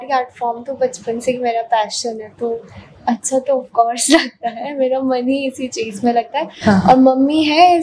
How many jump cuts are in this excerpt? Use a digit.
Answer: 0